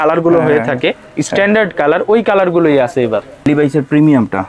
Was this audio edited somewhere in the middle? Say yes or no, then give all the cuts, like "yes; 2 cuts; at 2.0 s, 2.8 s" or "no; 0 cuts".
yes; 1 cut; at 3.5 s